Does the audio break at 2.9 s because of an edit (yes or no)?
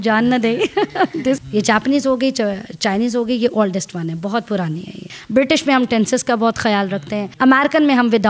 no